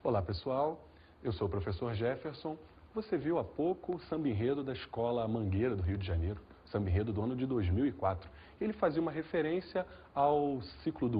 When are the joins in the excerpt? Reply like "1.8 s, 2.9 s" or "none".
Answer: 1.7 s